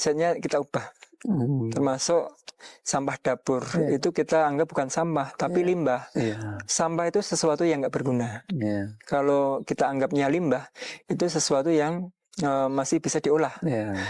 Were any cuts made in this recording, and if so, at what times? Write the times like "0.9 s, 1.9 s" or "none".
none